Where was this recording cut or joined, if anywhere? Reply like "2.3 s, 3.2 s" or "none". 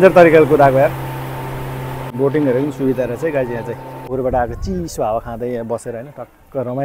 2.0 s, 4.1 s